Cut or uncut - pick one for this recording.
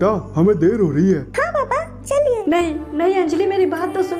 cut